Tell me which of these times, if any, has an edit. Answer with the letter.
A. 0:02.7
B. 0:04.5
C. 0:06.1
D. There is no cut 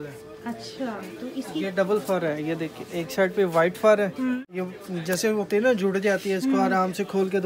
B